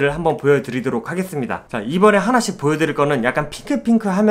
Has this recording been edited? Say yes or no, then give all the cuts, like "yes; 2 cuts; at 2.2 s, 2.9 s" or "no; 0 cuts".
no; 0 cuts